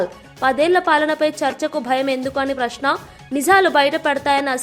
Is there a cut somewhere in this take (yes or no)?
no